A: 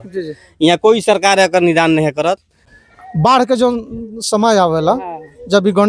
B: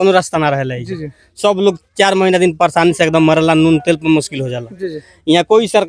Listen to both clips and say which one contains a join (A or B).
A